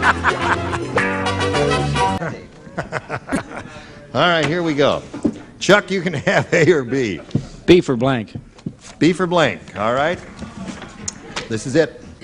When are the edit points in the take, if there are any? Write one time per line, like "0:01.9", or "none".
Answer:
none

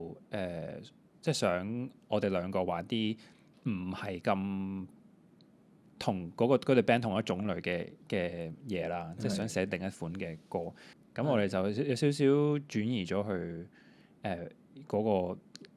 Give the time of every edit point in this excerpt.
0:10.9

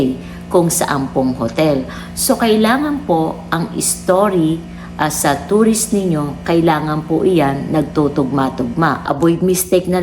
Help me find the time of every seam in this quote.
0:09.1

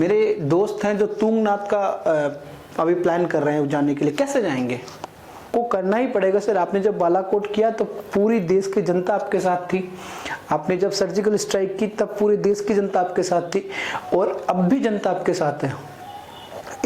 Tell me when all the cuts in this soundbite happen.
0:05.5

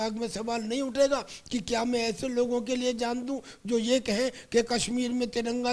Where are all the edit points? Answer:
none

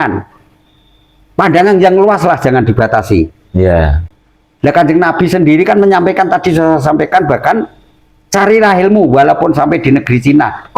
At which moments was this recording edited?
none

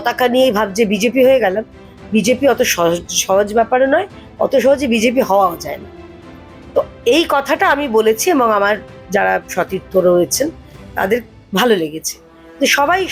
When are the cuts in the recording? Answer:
none

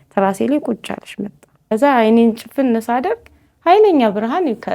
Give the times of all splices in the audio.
0:01.7

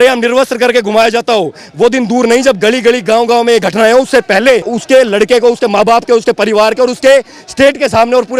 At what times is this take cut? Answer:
0:04.7

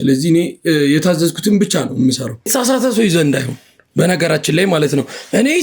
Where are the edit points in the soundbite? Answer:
0:02.5

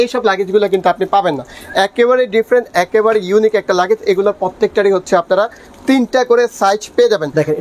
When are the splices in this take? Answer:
none

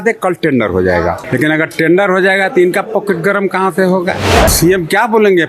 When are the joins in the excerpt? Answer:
0:01.2
0:04.5

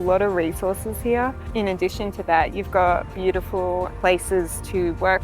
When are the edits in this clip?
0:01.5
0:03.9

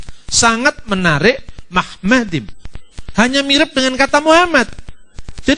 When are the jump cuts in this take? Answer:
none

